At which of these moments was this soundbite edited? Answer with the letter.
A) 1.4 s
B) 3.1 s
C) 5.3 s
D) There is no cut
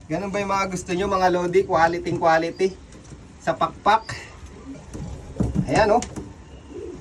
D